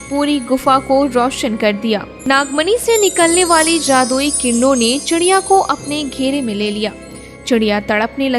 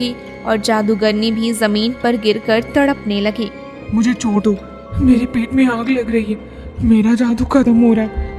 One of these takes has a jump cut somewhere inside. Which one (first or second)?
first